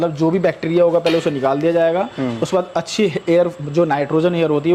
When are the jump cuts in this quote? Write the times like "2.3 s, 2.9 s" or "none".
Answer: none